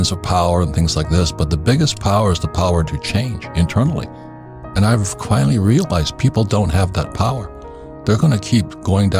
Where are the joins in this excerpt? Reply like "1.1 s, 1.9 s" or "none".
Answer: none